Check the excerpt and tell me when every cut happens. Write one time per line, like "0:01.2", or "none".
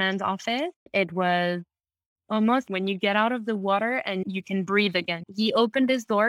0:00.9
0:02.7
0:04.2
0:05.2